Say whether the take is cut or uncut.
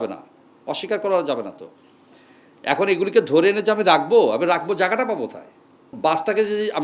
cut